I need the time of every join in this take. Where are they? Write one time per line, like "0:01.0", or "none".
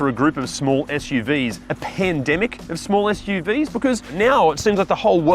0:01.7
0:04.1